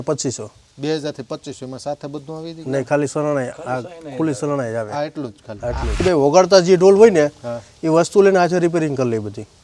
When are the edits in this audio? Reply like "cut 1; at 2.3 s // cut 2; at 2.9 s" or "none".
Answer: cut 1; at 6.0 s

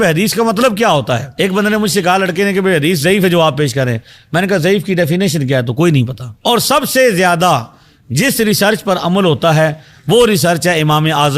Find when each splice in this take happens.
cut 1; at 1.3 s // cut 2; at 6.2 s

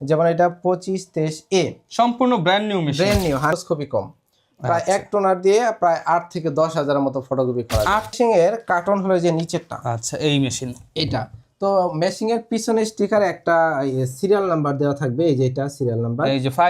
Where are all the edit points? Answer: cut 1; at 3.5 s // cut 2; at 8.1 s

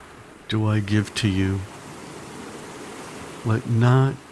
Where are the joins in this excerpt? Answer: cut 1; at 1.6 s // cut 2; at 3.4 s

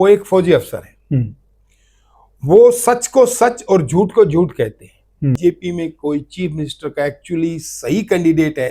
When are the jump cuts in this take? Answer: cut 1; at 5.4 s

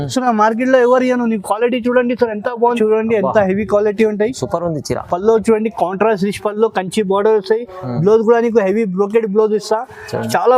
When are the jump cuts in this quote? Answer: cut 1; at 2.8 s

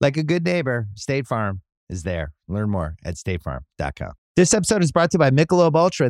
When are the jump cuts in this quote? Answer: cut 1; at 4.2 s

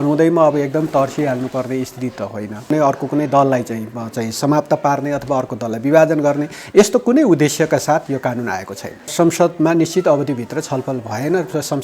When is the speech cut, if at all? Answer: cut 1; at 2.7 s // cut 2; at 9.1 s

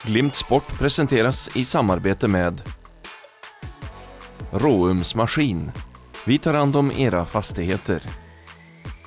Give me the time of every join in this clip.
none

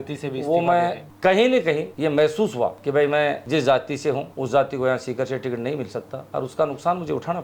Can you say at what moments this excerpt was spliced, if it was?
cut 1; at 1.1 s // cut 2; at 1.9 s // cut 3; at 2.8 s // cut 4; at 3.4 s // cut 5; at 4.3 s // cut 6; at 6.2 s

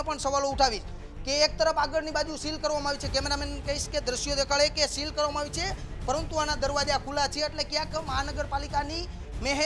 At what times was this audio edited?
none

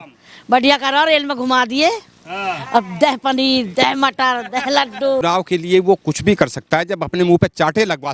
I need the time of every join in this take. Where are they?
cut 1; at 5.2 s

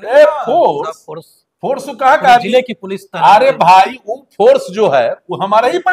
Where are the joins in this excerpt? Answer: none

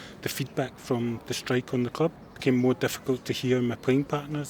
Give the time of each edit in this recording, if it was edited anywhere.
cut 1; at 2.3 s

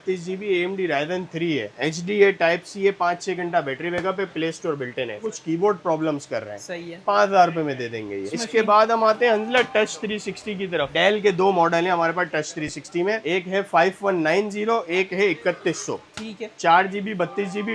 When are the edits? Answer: none

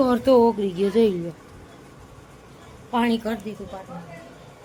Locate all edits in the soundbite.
none

